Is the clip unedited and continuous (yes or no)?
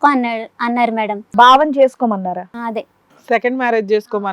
no